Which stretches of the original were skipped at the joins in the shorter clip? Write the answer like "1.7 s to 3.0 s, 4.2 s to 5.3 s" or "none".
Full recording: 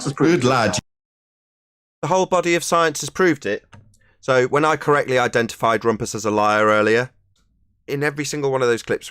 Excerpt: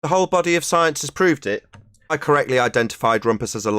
4.2 s to 4.8 s